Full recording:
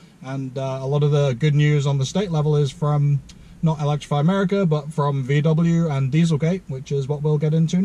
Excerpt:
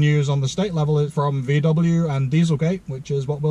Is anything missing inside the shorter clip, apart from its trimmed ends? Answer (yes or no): yes